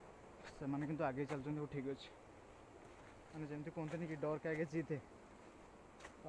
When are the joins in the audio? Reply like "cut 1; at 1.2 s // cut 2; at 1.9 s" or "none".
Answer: none